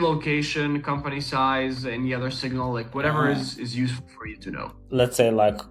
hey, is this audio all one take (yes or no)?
yes